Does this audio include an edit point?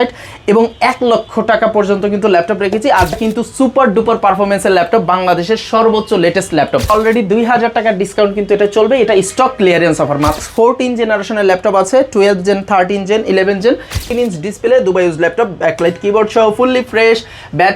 yes; 4 cuts; at 3.1 s, 6.9 s, 10.4 s, 14.1 s

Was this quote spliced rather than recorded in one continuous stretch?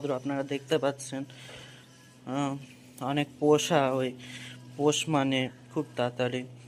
no; 0 cuts

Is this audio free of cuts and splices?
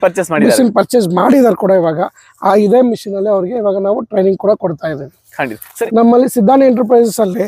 no; 1 cut; at 5.6 s

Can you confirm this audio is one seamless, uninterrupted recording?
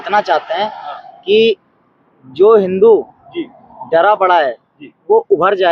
yes; 0 cuts

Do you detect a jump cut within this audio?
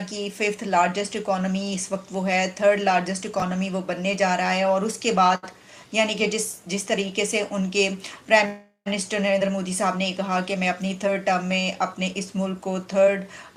no; 0 cuts

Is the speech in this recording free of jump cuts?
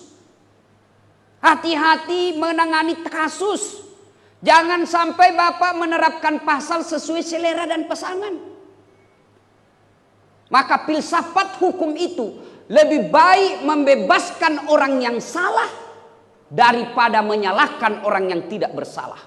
yes; 0 cuts

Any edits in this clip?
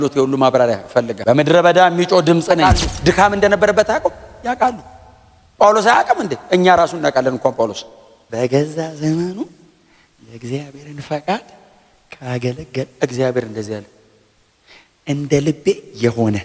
yes; 2 cuts; at 1.1 s, 2.6 s

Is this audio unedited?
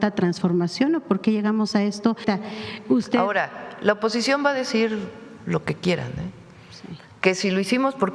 no; 1 cut; at 2.2 s

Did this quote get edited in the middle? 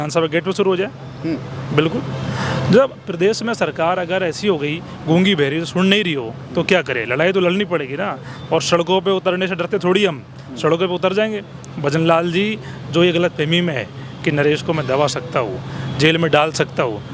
no; 0 cuts

